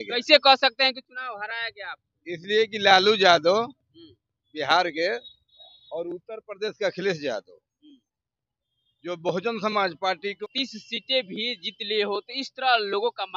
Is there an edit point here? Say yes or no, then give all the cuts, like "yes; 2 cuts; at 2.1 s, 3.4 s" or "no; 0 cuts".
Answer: yes; 1 cut; at 10.4 s